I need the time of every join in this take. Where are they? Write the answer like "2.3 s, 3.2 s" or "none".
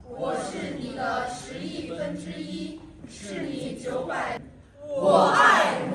4.1 s